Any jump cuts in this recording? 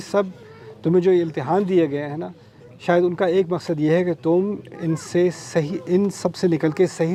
no; 0 cuts

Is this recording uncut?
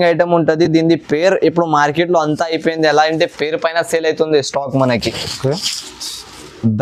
yes; 0 cuts

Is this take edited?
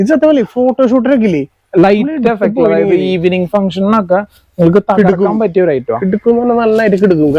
no; 0 cuts

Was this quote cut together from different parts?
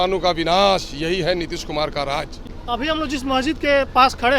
yes; 1 cut; at 2.4 s

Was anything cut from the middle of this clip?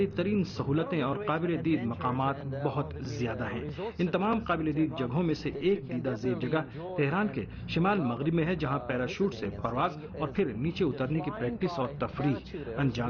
no; 0 cuts

